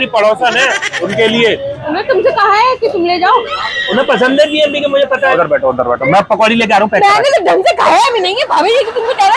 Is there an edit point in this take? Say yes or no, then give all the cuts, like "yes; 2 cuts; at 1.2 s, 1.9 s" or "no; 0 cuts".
yes; 4 cuts; at 0.9 s, 1.8 s, 3.7 s, 5.3 s